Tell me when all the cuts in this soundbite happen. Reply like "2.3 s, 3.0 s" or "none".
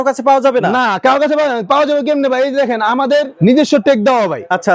3.3 s

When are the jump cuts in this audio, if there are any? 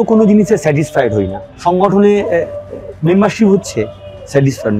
1.4 s

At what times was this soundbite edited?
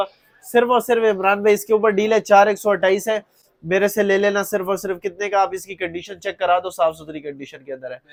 none

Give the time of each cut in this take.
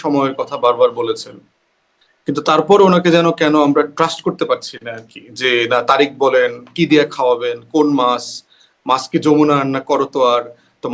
none

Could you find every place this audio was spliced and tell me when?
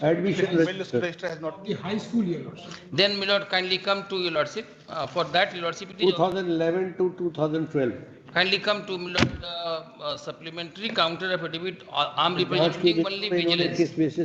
none

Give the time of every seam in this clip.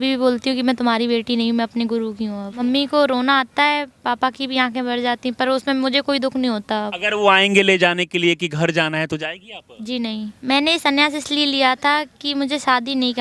2.6 s, 7.0 s, 10.3 s

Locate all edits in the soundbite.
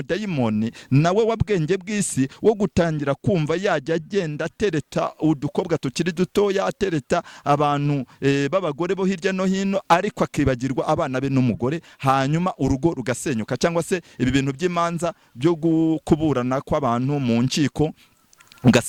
none

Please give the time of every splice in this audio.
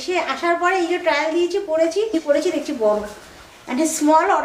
2.1 s

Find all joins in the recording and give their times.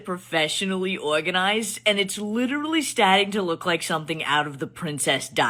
none

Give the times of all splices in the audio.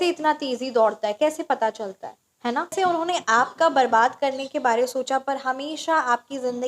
2.7 s

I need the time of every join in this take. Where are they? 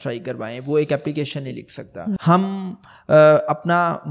2.2 s

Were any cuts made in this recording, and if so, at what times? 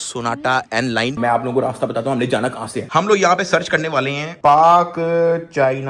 1.2 s

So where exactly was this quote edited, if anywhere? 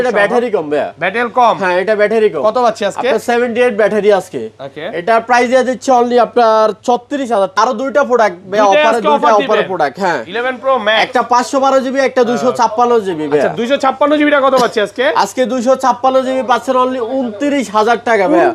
7.6 s

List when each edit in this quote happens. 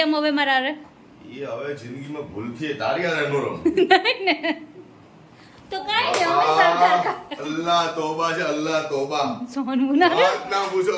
none

